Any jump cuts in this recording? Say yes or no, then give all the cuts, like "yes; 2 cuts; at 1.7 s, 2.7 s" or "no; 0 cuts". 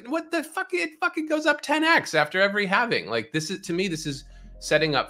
no; 0 cuts